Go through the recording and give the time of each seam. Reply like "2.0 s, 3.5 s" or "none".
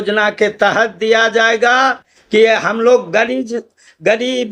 2.1 s